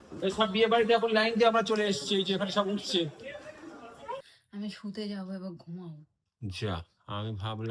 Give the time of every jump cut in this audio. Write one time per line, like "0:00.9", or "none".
0:04.2